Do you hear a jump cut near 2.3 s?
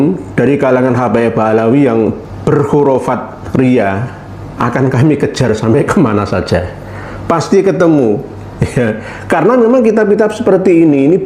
yes; 1 cut; at 2.3 s

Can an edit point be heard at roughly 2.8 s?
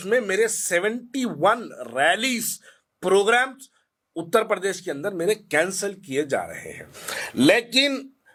no; 0 cuts

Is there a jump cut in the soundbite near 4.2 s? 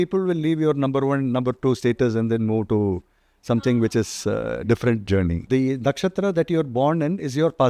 no; 1 cut; at 5.4 s

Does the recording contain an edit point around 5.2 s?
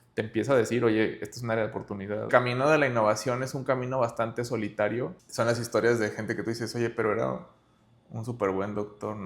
yes; 2 cuts; at 2.3 s, 5.2 s

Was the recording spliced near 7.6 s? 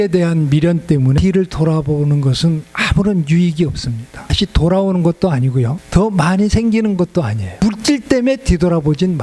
yes; 4 cuts; at 1.2 s, 4.3 s, 5.8 s, 7.6 s

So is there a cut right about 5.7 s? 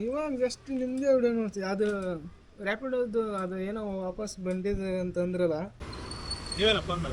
yes; 1 cut; at 5.7 s

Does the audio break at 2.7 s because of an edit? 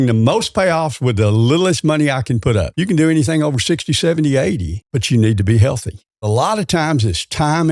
yes; 3 cuts; at 2.7 s, 4.7 s, 6.2 s

